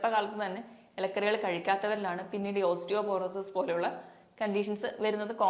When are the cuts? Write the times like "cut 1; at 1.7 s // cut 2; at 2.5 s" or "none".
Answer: none